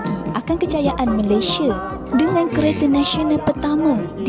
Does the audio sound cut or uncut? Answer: uncut